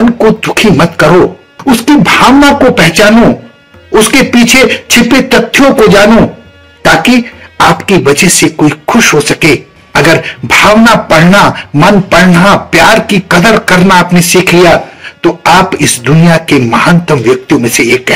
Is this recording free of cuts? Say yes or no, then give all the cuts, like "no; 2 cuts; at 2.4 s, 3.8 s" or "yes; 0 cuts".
yes; 0 cuts